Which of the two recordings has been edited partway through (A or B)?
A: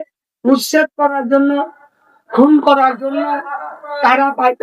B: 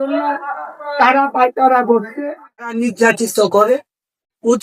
B